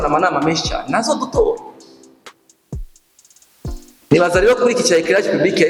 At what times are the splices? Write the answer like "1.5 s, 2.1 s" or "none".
none